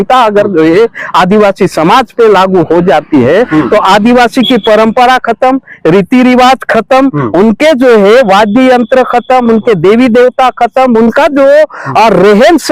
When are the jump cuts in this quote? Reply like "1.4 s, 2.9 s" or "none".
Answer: none